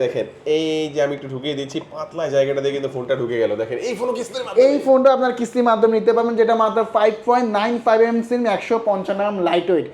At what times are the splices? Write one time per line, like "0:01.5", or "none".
none